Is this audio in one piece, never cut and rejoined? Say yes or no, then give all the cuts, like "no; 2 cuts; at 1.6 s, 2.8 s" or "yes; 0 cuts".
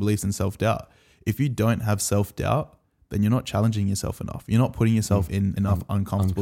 no; 1 cut; at 5.4 s